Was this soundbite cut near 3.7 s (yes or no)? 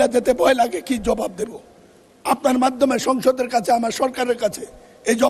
no